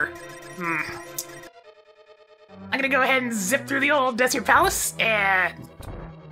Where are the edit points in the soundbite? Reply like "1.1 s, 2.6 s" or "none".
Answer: 1.5 s